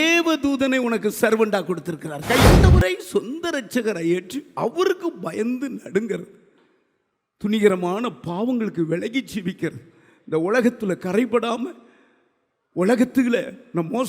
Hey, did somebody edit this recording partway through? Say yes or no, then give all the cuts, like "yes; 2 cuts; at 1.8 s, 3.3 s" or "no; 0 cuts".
yes; 1 cut; at 2.5 s